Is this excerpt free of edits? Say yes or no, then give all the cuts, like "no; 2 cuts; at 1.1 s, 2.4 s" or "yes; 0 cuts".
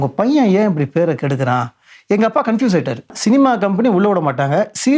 no; 1 cut; at 3.1 s